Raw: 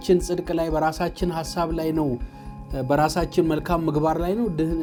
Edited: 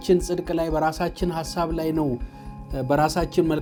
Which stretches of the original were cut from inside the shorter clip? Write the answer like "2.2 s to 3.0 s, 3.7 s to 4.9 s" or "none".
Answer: none